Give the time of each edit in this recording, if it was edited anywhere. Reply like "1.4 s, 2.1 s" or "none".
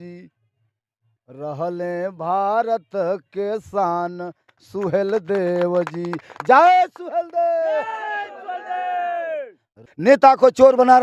9.9 s